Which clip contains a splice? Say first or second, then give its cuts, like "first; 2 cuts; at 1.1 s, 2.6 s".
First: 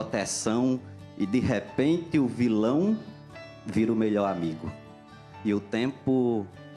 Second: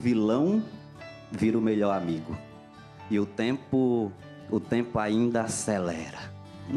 first; 1 cut; at 1.3 s